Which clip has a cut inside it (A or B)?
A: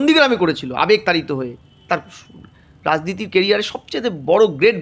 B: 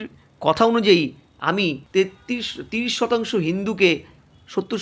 B